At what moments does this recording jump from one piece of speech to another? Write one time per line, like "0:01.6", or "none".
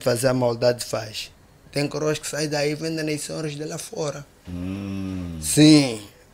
none